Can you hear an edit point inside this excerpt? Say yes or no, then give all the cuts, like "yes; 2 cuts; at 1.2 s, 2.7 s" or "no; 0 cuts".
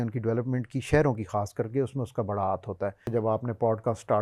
yes; 1 cut; at 3.0 s